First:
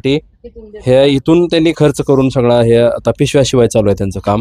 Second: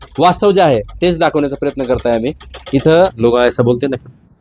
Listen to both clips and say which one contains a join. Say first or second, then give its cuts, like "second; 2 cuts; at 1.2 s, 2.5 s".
second; 1 cut; at 3.1 s